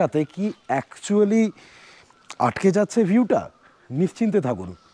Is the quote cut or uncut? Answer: uncut